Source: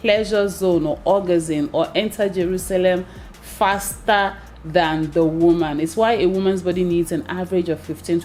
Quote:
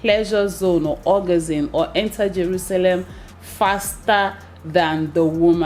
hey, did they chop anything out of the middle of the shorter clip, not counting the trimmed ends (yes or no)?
no